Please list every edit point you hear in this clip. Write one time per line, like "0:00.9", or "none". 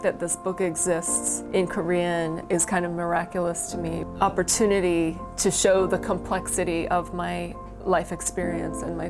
0:01.2
0:02.4
0:04.0